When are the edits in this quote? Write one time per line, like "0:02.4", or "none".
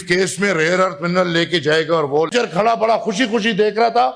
0:02.5